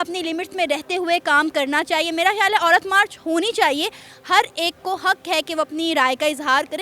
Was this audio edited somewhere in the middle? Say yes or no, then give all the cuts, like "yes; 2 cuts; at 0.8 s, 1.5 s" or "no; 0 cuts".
no; 0 cuts